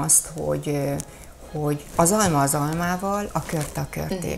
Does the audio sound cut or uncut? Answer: uncut